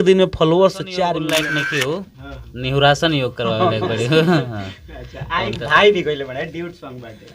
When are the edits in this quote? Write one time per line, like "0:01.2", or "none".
0:01.3

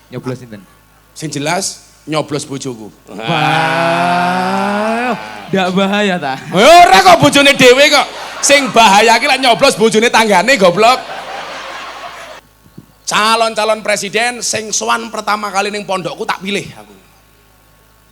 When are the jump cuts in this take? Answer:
0:12.3

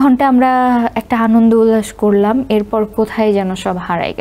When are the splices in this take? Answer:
none

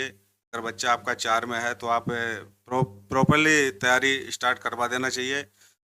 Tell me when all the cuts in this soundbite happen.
none

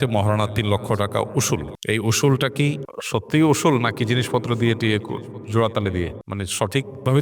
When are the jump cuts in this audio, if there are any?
0:01.7
0:02.9
0:06.2

